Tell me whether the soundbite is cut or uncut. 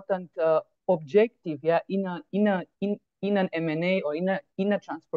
uncut